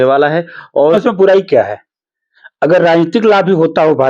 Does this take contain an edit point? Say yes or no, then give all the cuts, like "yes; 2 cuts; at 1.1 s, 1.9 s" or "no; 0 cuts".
yes; 1 cut; at 0.9 s